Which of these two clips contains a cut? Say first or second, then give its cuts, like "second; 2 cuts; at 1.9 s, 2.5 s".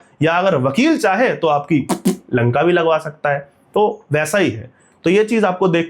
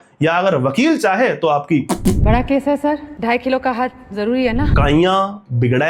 second; 2 cuts; at 2.2 s, 4.7 s